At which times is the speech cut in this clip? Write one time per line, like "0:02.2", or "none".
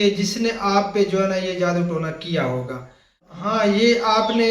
0:03.3